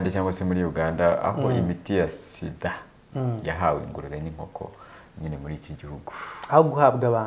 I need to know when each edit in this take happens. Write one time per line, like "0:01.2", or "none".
none